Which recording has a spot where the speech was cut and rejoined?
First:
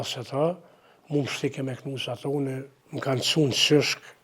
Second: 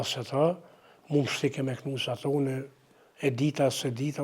first; 1 cut; at 2.8 s

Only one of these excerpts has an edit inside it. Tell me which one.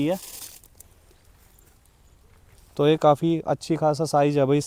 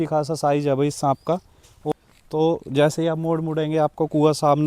second; 1 cut; at 1.9 s

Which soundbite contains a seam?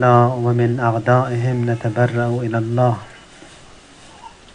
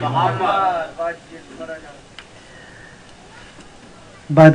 second; 1 cut; at 3.6 s

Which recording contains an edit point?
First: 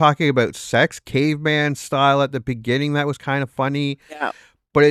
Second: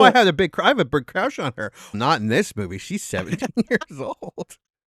second; 1 cut; at 2.0 s

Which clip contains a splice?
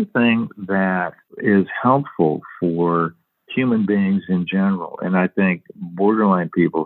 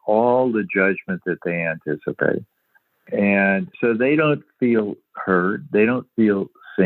second; 1 cut; at 3.0 s

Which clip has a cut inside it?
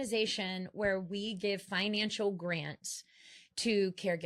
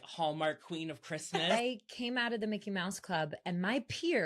second; 1 cut; at 1.5 s

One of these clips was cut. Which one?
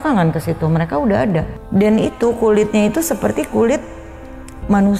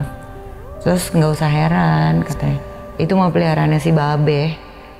first; 1 cut; at 1.6 s

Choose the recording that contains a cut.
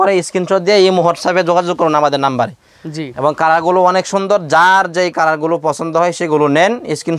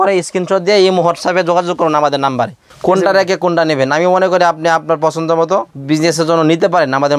second; 2 cuts; at 2.6 s, 5.7 s

